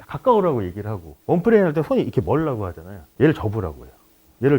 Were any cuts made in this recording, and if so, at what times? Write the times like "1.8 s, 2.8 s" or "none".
3.1 s